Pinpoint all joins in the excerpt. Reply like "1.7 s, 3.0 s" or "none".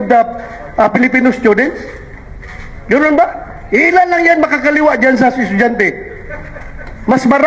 none